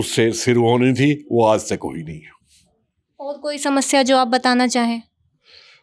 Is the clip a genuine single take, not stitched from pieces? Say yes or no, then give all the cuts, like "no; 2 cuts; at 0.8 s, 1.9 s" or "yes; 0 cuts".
yes; 0 cuts